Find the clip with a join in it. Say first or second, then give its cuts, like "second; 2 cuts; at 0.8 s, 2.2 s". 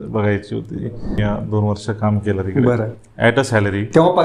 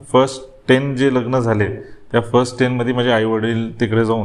first; 1 cut; at 1.2 s